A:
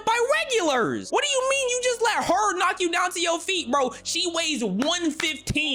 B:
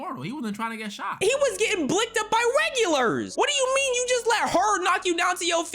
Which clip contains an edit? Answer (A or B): B